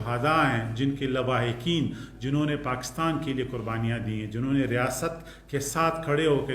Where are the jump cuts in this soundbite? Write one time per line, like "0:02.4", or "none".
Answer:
none